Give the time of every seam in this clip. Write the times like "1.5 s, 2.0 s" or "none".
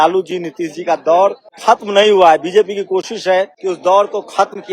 1.5 s, 3.6 s